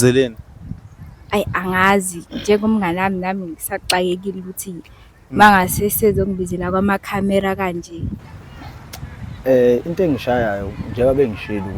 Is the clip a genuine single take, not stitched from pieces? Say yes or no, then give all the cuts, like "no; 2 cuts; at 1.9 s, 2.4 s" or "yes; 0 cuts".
no; 1 cut; at 8.1 s